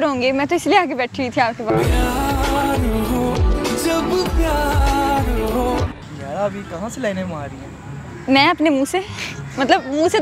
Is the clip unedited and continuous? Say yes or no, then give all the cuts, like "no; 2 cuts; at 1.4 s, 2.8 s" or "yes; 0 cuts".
yes; 0 cuts